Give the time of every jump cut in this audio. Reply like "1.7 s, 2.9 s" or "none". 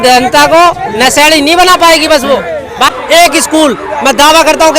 2.9 s

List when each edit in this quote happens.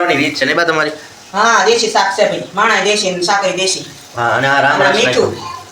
none

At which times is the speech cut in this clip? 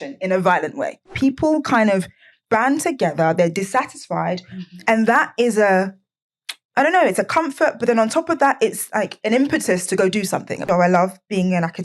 1.1 s, 10.6 s

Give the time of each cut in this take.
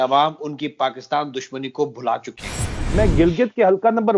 2.8 s

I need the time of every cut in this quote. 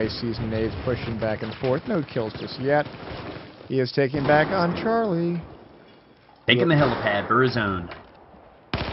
4.5 s

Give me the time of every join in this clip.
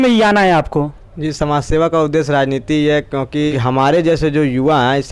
3.5 s

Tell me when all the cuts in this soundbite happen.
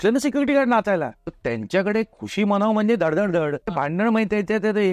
1.4 s, 3.7 s

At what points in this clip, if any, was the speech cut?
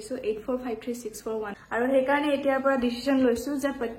1.5 s

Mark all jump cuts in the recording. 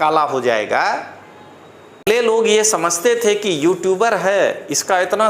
2.1 s

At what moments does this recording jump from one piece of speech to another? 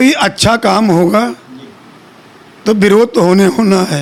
none

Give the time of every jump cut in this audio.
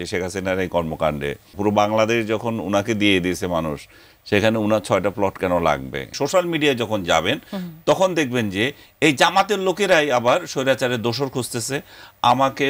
1.5 s, 6.1 s

